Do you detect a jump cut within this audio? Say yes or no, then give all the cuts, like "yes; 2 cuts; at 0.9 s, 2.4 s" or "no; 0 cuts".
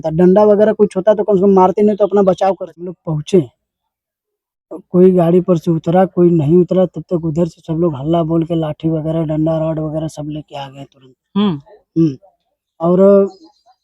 yes; 1 cut; at 3.0 s